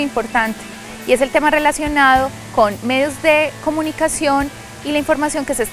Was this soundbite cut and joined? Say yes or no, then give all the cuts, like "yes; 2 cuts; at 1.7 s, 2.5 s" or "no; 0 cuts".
no; 0 cuts